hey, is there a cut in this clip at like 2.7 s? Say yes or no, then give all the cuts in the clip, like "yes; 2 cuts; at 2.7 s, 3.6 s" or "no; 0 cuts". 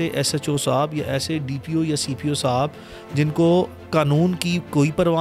no; 0 cuts